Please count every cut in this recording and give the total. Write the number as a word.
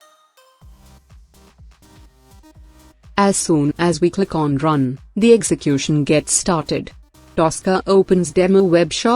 one